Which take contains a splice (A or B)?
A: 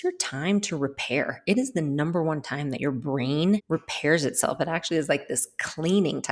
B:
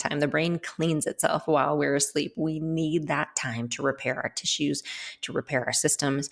A